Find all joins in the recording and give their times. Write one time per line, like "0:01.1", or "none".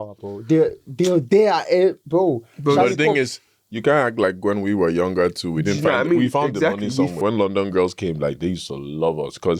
0:07.2